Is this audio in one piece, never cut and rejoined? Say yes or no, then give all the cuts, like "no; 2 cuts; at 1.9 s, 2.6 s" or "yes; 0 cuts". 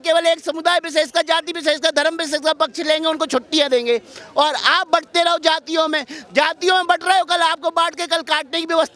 yes; 0 cuts